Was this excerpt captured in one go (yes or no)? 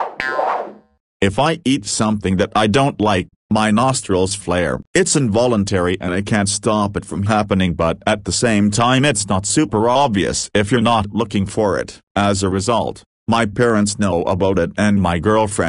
no